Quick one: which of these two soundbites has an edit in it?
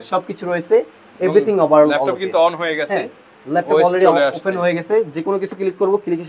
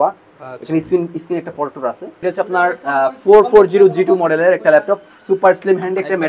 second; 1 cut; at 2.2 s

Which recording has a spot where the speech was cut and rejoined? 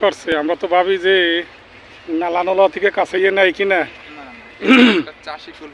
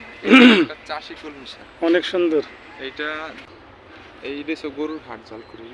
second; 1 cut; at 3.4 s

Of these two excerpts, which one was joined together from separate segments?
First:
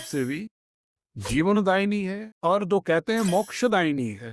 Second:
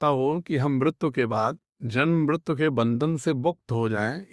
first; 1 cut; at 2.2 s

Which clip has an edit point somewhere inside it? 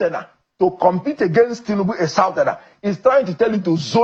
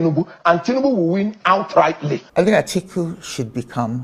second; 1 cut; at 2.2 s

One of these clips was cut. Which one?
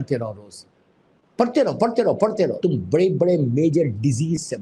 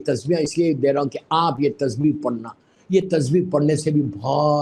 first; 1 cut; at 2.6 s

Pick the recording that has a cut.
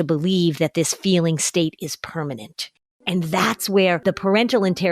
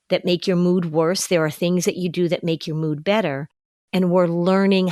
first; 1 cut; at 4.0 s

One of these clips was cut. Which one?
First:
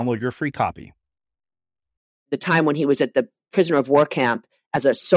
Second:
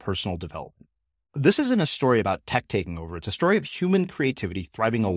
first; 1 cut; at 2.3 s

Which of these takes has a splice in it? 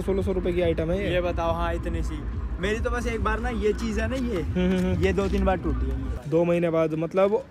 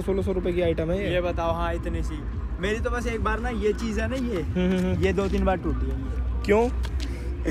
first; 1 cut; at 6.1 s

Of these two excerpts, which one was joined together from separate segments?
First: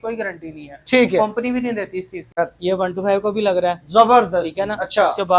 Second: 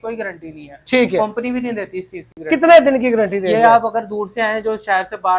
first; 1 cut; at 2.4 s

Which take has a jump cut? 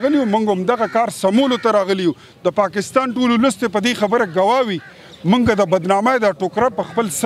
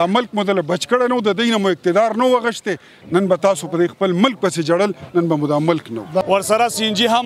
second; 1 cut; at 6.3 s

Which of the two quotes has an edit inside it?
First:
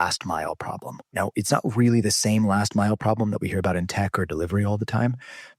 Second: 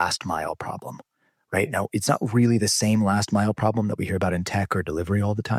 first; 1 cut; at 1.1 s

